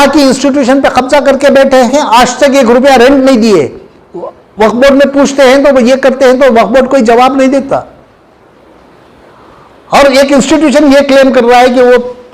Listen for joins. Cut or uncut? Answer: cut